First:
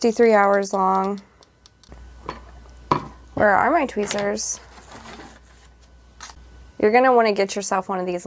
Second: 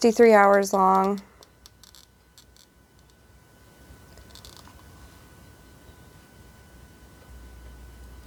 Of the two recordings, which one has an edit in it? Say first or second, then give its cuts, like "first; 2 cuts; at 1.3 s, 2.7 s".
first; 2 cuts; at 1.9 s, 6.4 s